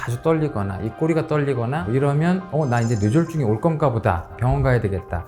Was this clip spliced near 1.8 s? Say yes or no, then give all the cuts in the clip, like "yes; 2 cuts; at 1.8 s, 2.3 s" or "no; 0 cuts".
yes; 1 cut; at 1.8 s